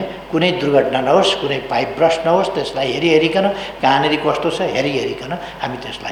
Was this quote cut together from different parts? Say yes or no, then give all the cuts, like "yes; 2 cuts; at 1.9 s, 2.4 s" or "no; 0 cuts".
no; 0 cuts